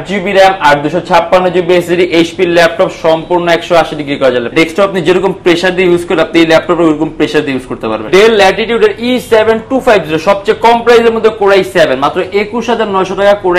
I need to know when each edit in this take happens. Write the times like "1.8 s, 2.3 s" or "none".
4.5 s, 8.1 s